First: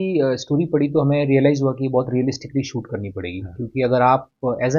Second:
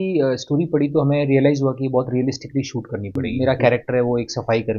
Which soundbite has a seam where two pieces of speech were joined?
second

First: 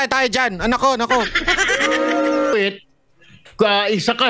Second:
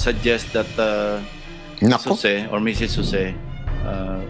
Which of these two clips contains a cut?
first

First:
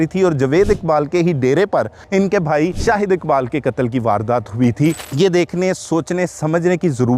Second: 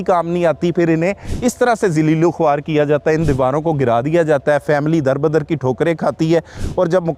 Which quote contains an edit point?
first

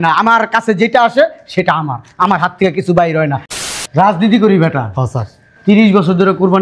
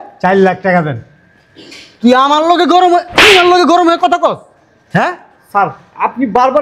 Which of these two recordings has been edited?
first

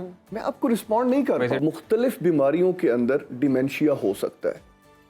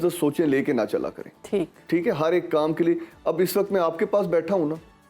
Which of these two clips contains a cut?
first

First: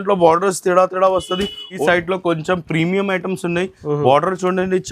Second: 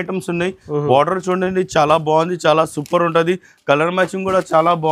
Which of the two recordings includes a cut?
first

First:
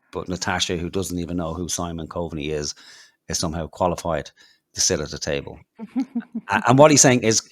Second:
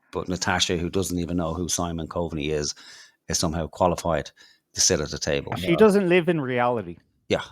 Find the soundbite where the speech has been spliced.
second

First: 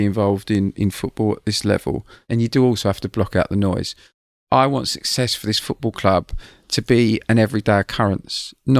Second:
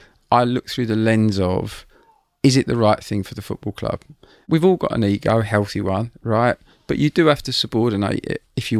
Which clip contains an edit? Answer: first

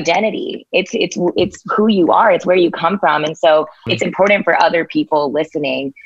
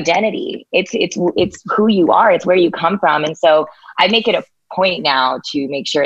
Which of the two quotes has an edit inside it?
first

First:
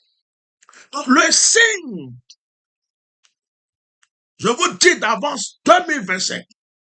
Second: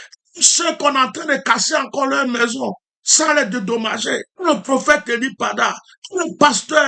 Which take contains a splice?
second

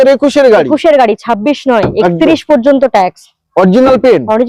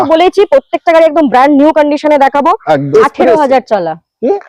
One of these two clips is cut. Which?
second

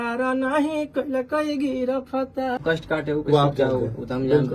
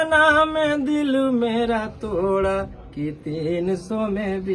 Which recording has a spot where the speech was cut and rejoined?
first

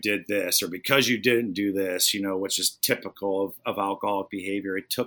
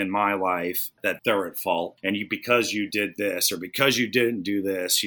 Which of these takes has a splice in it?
second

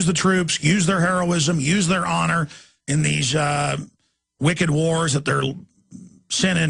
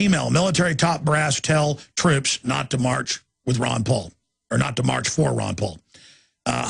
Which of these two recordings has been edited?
first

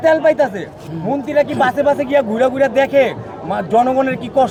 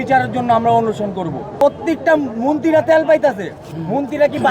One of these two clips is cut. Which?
second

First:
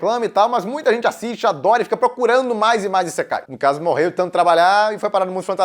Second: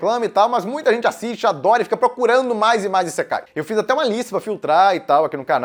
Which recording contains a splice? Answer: first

